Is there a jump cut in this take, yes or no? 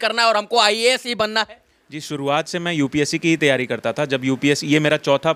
no